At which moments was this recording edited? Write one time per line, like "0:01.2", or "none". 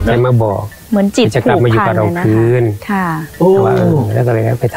none